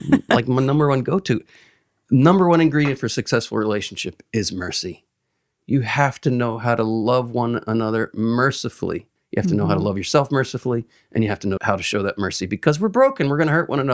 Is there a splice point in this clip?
yes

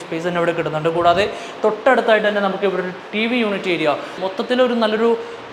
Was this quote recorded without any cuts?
no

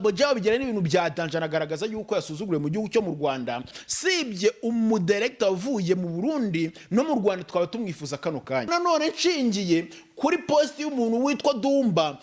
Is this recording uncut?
no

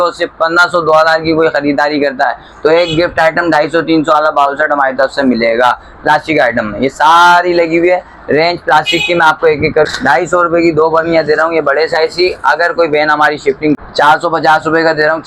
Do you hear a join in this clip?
yes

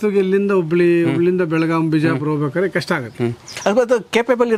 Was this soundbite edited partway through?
no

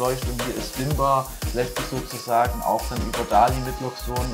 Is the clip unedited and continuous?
yes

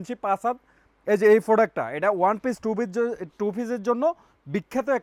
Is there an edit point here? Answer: no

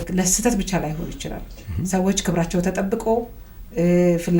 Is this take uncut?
yes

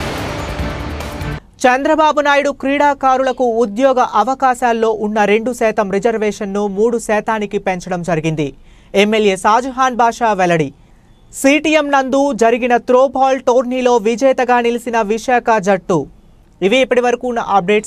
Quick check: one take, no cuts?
yes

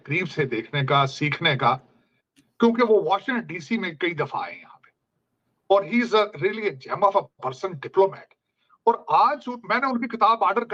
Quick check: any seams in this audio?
no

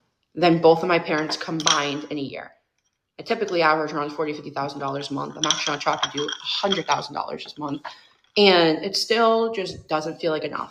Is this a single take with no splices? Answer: yes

